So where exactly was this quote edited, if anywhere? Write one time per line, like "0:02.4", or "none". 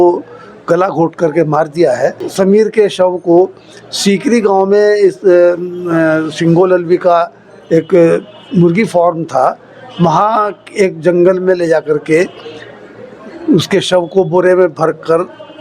0:02.2

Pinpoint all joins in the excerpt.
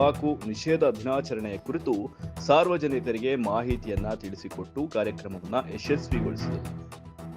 0:06.0

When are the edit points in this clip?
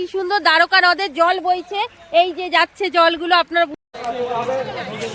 0:03.8

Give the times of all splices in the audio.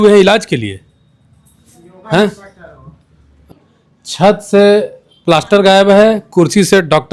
0:03.4

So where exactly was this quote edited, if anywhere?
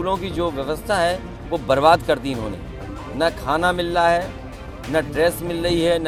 none

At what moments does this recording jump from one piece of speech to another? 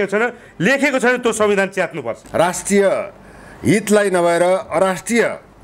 0:02.2

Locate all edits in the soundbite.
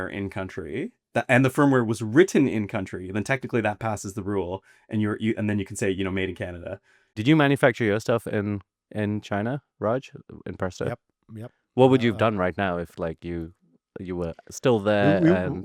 0:07.1

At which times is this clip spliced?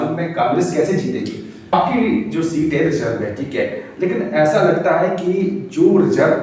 0:01.7

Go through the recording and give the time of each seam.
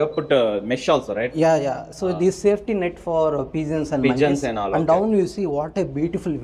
none

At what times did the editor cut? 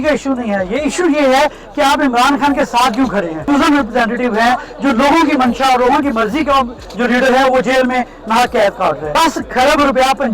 0:03.4
0:09.1

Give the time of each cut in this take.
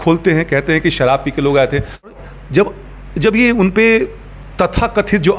0:02.1

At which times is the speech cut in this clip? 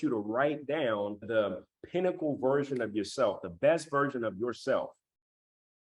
0:01.2

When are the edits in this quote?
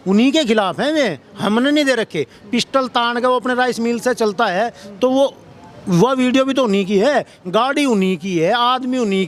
none

